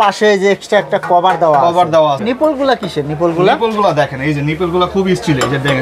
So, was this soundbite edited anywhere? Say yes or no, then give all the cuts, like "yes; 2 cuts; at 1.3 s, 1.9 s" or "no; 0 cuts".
yes; 1 cut; at 2.2 s